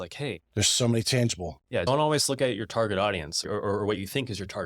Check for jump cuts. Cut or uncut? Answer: cut